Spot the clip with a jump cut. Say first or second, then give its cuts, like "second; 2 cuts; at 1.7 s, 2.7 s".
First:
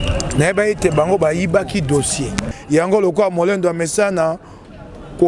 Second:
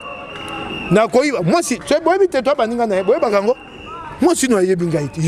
first; 1 cut; at 2.5 s